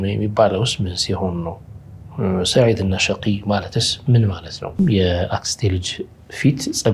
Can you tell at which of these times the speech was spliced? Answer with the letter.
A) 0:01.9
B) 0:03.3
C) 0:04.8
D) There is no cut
C